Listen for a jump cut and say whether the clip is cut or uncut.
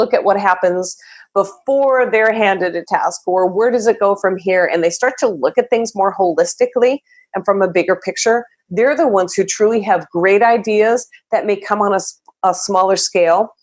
uncut